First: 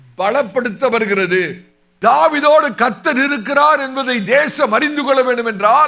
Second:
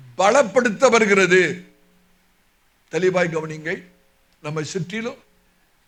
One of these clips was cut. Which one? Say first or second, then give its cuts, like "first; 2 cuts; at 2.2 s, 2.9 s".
first; 1 cut; at 1.9 s